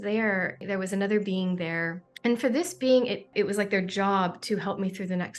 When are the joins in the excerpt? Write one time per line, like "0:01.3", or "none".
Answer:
0:03.3